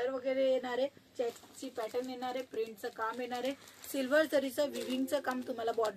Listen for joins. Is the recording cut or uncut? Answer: uncut